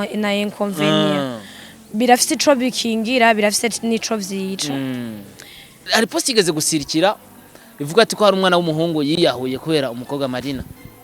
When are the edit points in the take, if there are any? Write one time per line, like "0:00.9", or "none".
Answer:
0:05.9